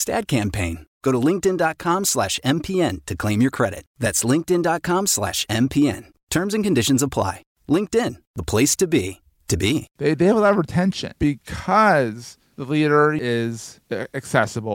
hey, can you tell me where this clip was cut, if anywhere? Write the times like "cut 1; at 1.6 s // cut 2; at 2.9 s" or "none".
cut 1; at 9.9 s // cut 2; at 11.1 s // cut 3; at 13.2 s